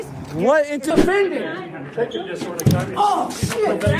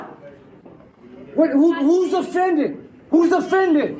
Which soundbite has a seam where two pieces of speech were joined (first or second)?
first